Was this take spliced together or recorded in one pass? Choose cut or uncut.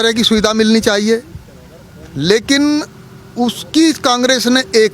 uncut